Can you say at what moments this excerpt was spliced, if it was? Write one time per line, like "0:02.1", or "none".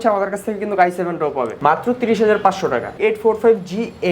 0:01.5
0:02.9